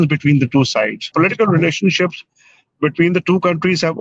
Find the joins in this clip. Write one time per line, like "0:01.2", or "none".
0:01.1